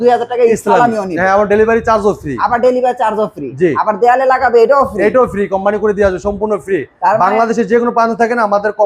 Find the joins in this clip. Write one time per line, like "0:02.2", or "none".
none

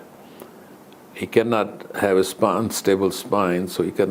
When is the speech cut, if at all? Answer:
none

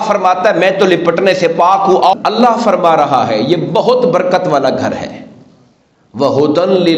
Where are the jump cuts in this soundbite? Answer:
0:02.1

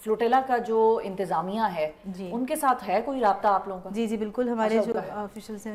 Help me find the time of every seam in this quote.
none

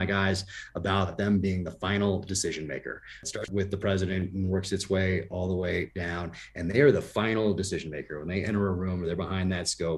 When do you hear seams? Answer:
0:01.1
0:03.4

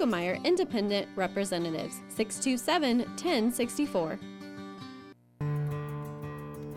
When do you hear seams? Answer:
0:05.1

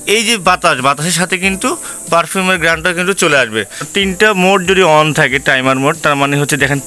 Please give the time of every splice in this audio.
0:03.8

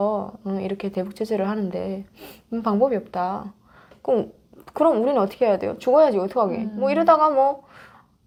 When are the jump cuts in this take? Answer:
none

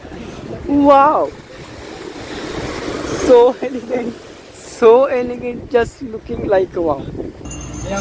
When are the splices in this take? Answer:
0:07.0

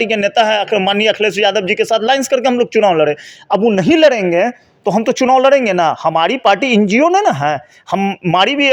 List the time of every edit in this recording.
none

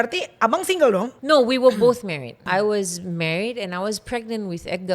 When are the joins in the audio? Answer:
0:01.1
0:02.4

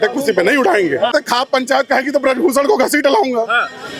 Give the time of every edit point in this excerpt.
0:01.1

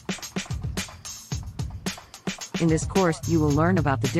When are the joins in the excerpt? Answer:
0:01.3

